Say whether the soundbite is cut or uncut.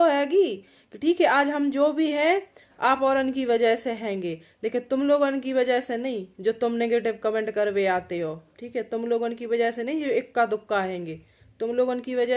uncut